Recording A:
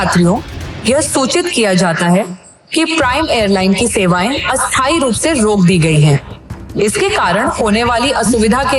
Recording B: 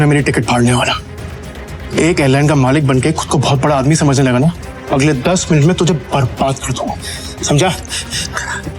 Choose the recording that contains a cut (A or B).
B